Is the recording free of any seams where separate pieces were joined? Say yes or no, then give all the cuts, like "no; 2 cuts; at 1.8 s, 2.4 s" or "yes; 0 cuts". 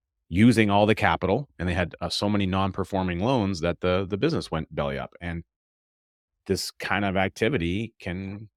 yes; 0 cuts